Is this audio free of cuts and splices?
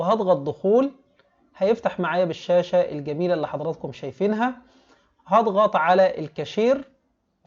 yes; 0 cuts

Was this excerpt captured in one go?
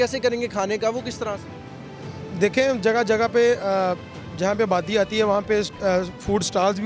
yes; 0 cuts

